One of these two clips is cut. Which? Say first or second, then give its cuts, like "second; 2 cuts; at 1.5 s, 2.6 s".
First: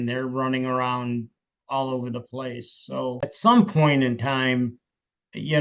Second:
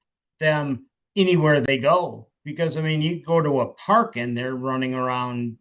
first; 1 cut; at 3.2 s